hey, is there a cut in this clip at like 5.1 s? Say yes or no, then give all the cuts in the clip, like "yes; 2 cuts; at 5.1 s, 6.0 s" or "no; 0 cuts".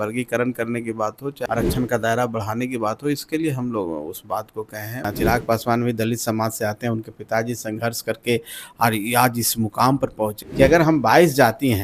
yes; 3 cuts; at 1.4 s, 5.1 s, 10.4 s